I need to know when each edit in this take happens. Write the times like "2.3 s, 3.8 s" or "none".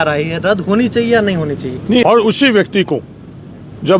2.1 s